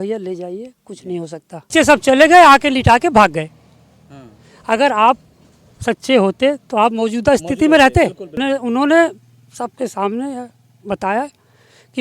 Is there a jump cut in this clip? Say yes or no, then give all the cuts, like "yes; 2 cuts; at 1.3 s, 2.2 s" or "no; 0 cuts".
yes; 2 cuts; at 1.7 s, 8.4 s